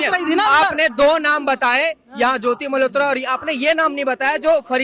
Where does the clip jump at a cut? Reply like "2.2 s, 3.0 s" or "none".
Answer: none

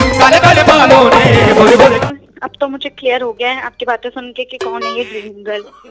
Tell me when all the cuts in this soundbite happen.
2.0 s

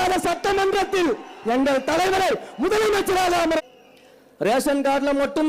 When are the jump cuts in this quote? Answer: 3.6 s

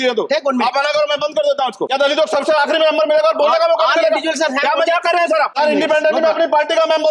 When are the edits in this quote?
1.9 s, 5.5 s

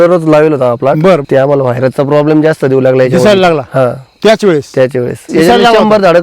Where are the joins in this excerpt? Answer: 1.2 s, 5.2 s

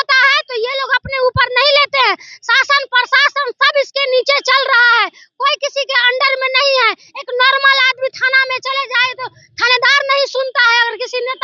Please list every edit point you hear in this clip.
none

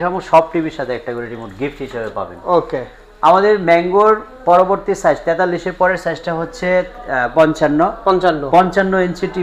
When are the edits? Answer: none

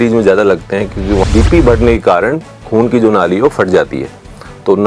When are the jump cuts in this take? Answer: 1.2 s

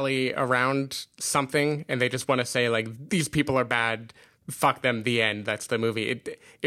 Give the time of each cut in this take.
2.9 s

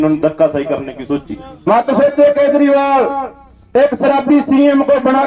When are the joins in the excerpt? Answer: 1.7 s

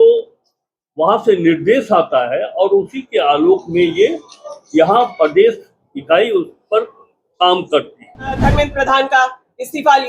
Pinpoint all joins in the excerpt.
8.4 s

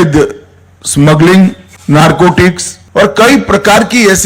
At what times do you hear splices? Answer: 1.7 s, 2.7 s

